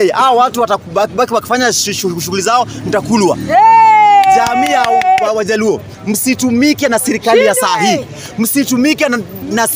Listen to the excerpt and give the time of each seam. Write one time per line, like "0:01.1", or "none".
none